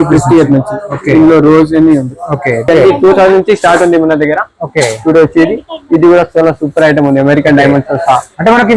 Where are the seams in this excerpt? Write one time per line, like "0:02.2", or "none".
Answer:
0:02.7